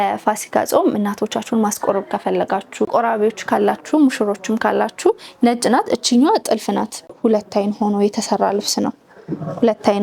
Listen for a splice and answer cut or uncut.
cut